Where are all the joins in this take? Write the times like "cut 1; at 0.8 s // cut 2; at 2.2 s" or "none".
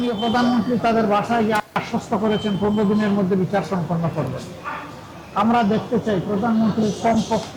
none